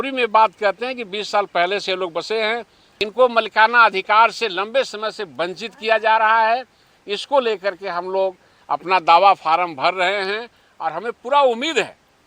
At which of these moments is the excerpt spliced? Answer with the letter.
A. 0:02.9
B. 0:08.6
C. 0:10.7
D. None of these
A